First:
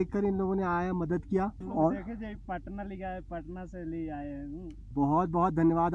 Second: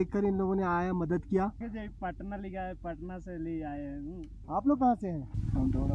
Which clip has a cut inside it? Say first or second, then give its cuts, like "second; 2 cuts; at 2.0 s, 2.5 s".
second; 2 cuts; at 1.6 s, 4.4 s